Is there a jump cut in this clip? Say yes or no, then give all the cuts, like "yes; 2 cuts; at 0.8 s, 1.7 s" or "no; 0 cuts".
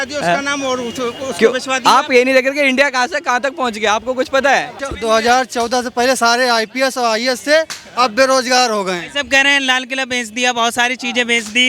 yes; 1 cut; at 4.8 s